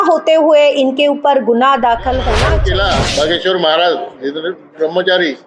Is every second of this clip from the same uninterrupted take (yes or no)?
no